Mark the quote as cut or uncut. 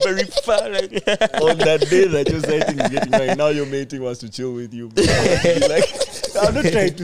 cut